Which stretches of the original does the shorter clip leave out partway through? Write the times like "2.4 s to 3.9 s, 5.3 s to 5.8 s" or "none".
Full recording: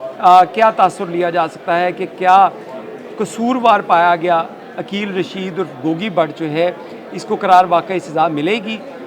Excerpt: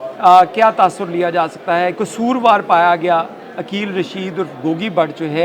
2.0 s to 3.2 s